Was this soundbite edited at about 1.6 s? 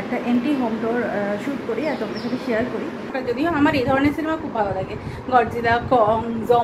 no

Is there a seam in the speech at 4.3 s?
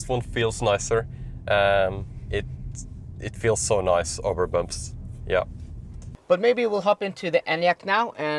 no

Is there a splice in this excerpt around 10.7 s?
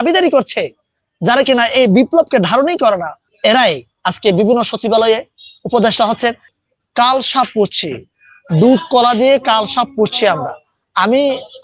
no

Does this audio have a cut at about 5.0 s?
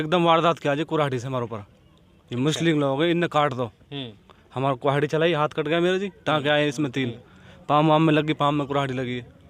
no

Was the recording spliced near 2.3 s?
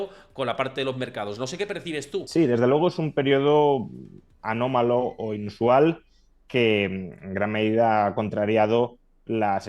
yes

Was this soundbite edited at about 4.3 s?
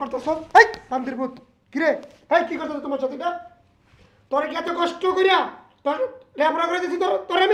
no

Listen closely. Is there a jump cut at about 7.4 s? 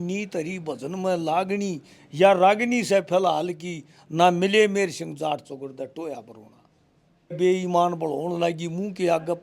yes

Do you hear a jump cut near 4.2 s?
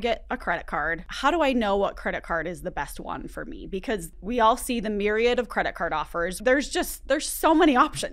yes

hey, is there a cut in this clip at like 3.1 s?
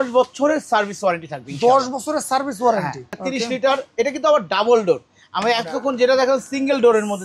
yes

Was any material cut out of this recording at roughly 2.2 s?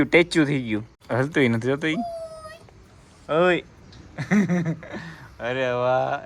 no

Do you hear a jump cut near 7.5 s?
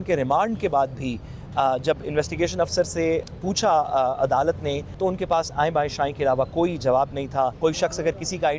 yes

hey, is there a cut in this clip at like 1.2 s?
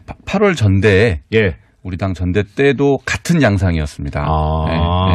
no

